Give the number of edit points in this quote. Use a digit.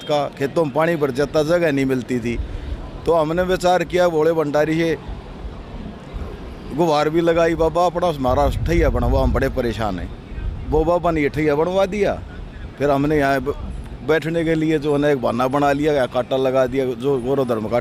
0